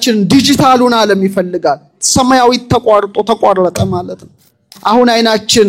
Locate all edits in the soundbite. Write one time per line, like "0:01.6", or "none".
0:04.7